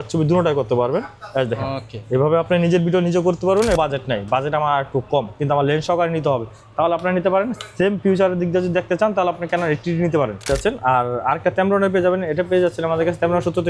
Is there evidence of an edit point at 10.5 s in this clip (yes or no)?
yes